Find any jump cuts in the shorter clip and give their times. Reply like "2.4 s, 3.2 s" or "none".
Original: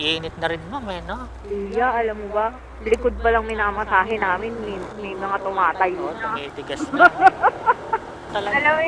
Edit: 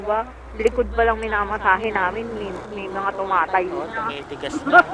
none